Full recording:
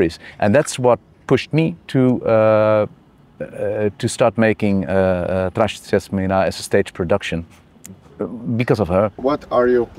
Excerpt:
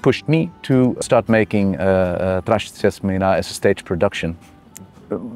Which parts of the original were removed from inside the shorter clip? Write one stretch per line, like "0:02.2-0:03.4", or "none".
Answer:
0:02.2-0:04.1